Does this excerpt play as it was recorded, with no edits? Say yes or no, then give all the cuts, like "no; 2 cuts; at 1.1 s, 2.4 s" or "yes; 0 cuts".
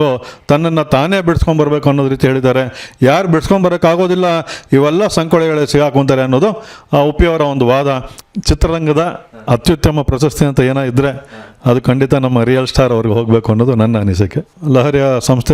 no; 2 cuts; at 8.1 s, 14.5 s